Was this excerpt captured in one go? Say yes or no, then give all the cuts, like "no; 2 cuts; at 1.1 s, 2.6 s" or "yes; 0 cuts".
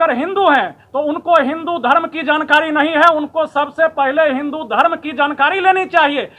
yes; 0 cuts